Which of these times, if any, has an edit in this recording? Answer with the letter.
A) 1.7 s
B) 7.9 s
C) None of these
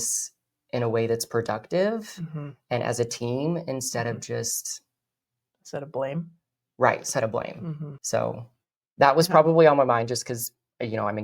B